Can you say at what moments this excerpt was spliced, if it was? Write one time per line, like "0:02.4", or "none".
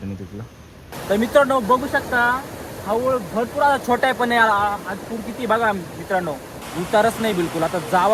0:00.9
0:06.6